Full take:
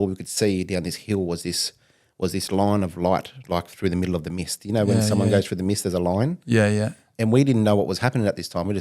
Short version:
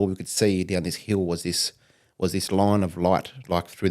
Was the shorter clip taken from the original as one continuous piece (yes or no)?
yes